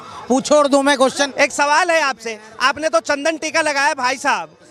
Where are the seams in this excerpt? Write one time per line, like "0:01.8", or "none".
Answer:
0:01.3